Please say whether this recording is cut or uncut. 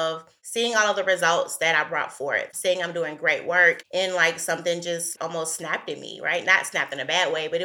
cut